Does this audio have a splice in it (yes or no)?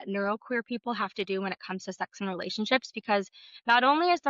no